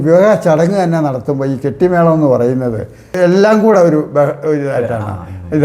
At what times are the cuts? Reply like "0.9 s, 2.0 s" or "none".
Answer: 3.1 s